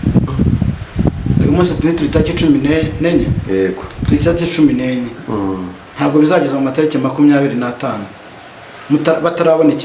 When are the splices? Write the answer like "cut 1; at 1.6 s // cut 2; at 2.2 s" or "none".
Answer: none